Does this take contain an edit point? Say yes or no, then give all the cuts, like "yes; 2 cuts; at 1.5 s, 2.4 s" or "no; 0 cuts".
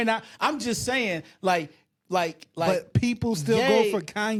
no; 0 cuts